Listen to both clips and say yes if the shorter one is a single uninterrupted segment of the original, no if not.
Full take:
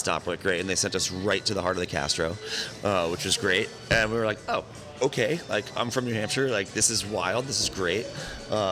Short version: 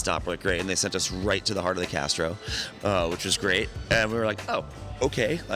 yes